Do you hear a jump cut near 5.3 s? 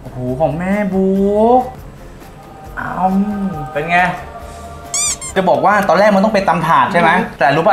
yes; 2 cuts; at 1.8 s, 5.3 s

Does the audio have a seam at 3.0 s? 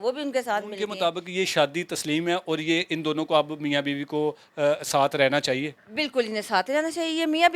no; 1 cut; at 0.9 s

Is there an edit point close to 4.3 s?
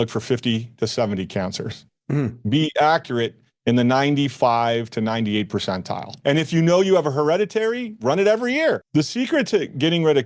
no; 2 cuts; at 6.1 s, 8.8 s

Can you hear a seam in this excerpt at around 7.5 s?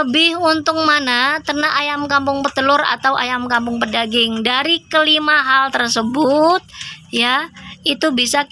no; 0 cuts

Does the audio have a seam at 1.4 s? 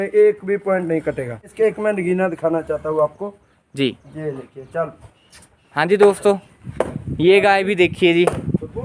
yes; 1 cut; at 1.4 s

